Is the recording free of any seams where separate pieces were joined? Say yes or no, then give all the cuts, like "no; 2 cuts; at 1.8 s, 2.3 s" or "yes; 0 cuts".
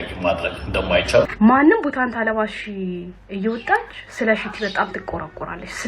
no; 1 cut; at 1.3 s